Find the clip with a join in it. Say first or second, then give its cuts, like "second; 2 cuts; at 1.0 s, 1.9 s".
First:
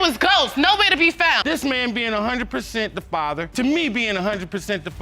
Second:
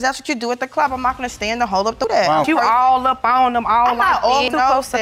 first; 1 cut; at 1.4 s